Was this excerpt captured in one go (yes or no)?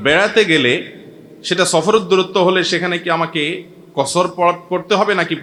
yes